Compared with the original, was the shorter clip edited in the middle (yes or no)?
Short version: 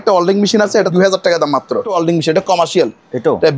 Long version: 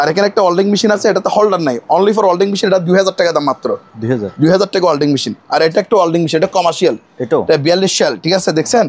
yes